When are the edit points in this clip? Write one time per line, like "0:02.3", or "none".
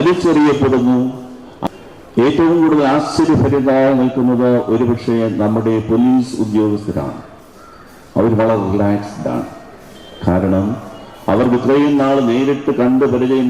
0:01.5